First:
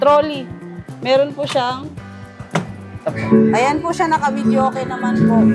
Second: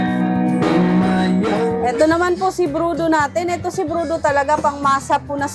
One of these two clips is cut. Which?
first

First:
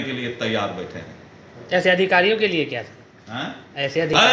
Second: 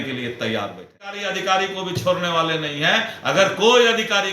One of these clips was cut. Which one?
second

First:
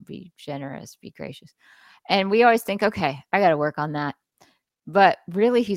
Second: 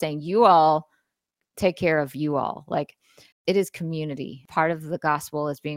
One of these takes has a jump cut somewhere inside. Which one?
second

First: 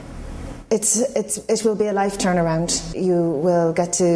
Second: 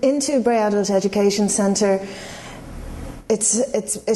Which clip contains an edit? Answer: first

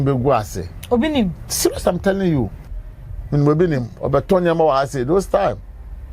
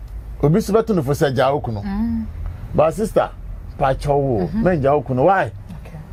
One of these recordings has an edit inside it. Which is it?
first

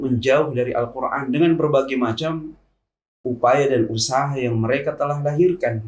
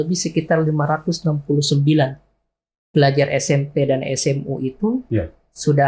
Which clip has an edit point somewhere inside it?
first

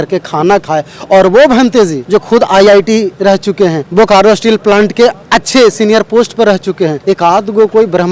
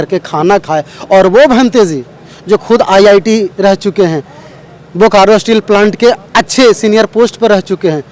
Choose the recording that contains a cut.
first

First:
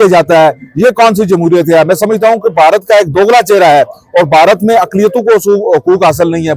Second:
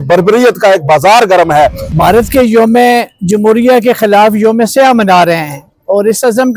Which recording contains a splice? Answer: second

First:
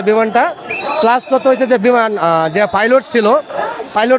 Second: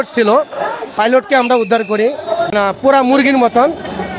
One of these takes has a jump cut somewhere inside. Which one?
second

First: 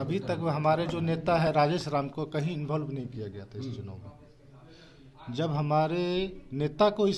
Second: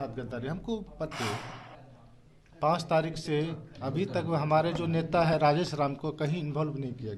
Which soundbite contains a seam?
second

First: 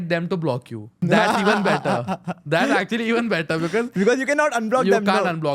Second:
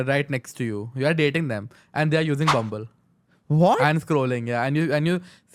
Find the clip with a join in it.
first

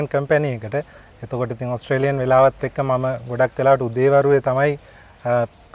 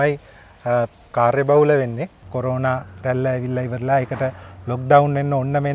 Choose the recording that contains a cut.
second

